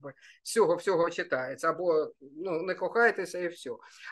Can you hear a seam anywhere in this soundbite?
no; 0 cuts

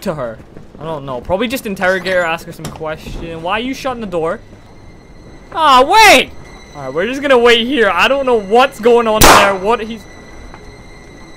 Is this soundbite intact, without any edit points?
yes; 0 cuts

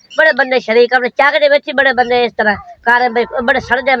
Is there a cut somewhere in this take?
no; 0 cuts

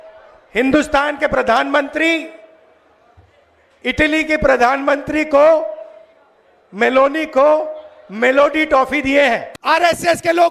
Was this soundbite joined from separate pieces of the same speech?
yes; 1 cut; at 9.5 s

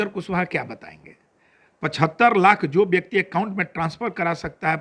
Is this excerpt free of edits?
yes; 0 cuts

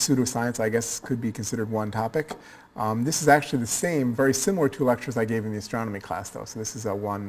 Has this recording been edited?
no; 0 cuts

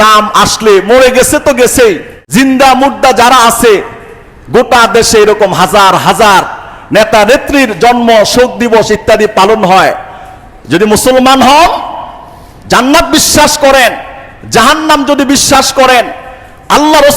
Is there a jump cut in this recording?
yes; 1 cut; at 2.1 s

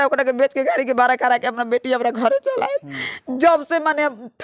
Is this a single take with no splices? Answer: yes; 0 cuts

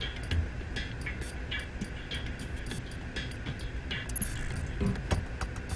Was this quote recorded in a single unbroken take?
yes; 0 cuts

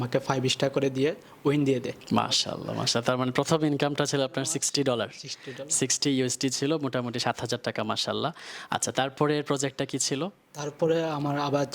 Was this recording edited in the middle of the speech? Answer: no; 0 cuts

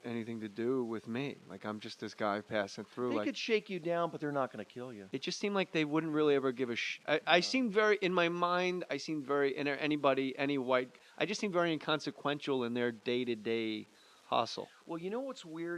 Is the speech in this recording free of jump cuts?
no; 1 cut; at 7.2 s

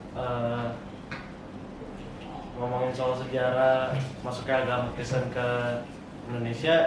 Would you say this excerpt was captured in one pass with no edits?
yes; 0 cuts

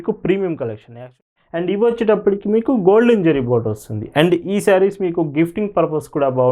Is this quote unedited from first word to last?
no; 1 cut; at 1.1 s

